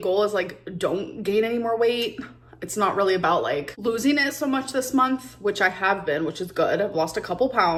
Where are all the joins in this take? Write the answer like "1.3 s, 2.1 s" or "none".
none